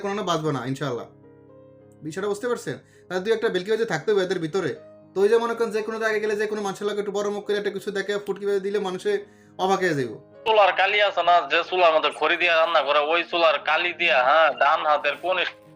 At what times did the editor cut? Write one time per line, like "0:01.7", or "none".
0:10.4